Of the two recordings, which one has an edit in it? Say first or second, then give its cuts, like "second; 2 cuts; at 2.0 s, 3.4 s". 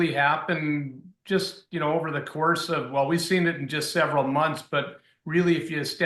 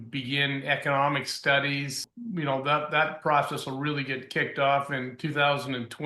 second; 1 cut; at 2.0 s